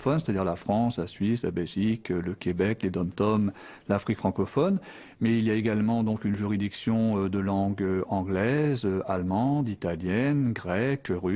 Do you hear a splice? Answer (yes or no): yes